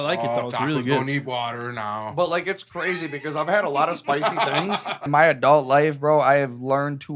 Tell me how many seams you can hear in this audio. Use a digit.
1